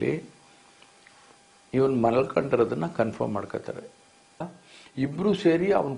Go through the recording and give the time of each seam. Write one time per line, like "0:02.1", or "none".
0:04.5